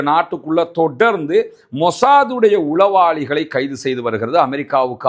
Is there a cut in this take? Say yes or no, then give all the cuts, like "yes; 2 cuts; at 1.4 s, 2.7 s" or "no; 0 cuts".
no; 0 cuts